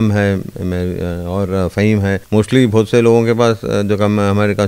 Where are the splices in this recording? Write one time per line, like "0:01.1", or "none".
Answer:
0:02.2